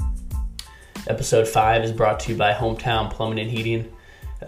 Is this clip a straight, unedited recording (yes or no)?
no